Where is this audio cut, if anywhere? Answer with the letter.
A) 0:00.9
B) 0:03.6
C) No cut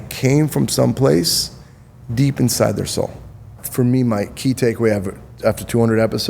B